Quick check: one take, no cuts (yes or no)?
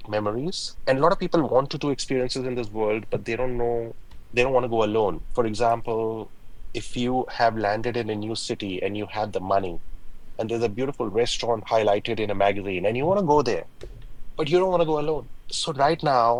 yes